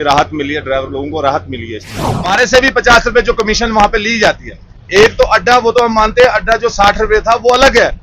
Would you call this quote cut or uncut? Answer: cut